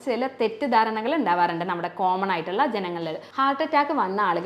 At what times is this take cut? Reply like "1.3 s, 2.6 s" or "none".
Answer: 3.2 s